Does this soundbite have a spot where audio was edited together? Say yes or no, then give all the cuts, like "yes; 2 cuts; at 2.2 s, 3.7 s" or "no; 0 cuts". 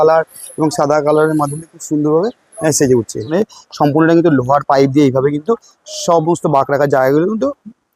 yes; 1 cut; at 3.3 s